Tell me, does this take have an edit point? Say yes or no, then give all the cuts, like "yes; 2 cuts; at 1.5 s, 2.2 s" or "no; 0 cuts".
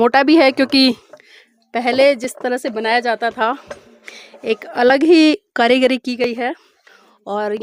no; 0 cuts